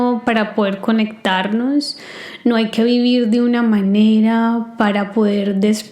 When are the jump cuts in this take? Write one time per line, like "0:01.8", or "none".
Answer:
none